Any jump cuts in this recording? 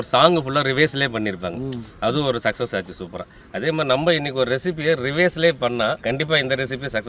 yes; 1 cut; at 6.0 s

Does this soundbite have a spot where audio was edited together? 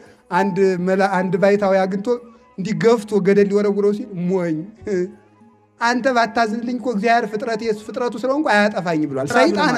no; 0 cuts

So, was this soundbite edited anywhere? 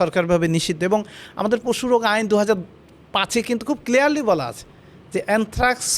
no; 0 cuts

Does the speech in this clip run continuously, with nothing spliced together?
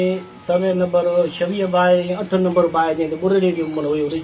yes; 0 cuts

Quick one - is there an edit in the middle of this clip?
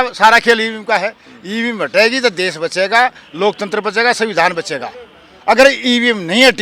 no; 0 cuts

